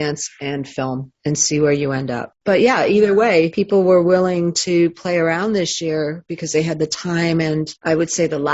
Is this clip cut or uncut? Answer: uncut